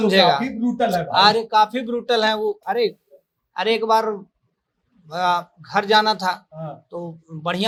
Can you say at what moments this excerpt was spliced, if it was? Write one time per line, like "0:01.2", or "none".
none